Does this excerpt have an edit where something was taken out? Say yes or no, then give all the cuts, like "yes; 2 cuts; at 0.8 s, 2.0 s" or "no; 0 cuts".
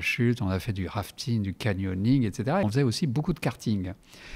yes; 1 cut; at 2.6 s